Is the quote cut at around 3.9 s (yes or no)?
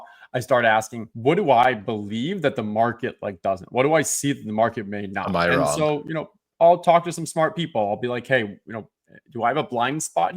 no